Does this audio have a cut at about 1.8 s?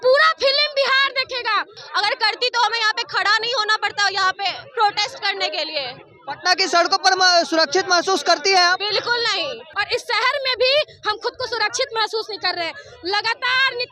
yes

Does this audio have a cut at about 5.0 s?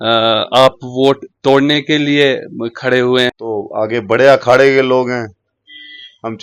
no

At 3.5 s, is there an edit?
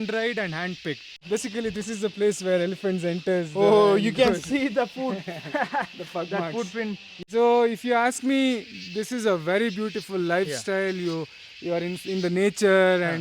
no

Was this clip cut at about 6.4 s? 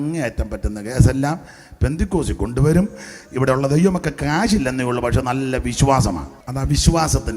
yes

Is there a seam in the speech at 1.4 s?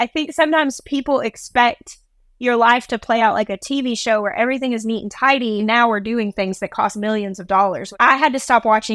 no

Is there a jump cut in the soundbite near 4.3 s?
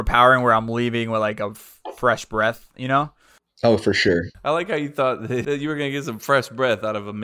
yes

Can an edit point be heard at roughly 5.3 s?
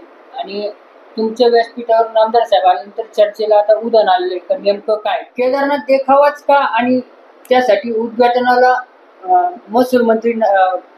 yes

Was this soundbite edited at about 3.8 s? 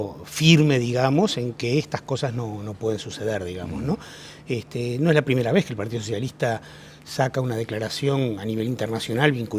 yes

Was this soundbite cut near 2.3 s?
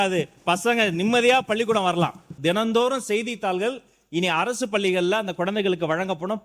yes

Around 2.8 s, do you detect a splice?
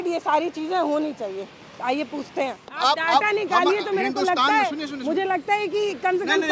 yes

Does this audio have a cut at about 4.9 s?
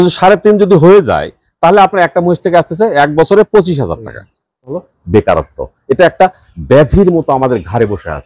yes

